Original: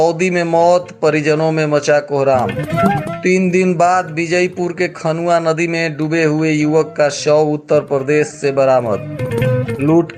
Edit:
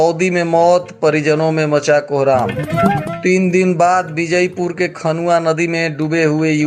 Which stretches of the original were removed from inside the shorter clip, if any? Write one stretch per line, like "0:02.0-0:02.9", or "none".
none